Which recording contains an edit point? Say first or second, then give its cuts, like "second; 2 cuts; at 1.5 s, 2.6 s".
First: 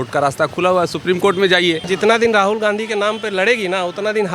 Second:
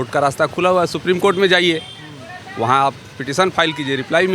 first; 1 cut; at 1.8 s